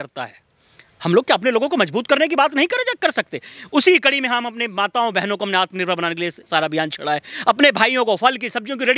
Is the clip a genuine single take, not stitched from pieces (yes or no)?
yes